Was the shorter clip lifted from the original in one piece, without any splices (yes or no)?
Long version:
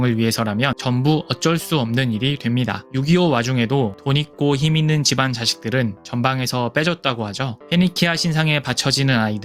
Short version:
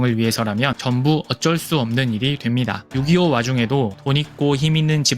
yes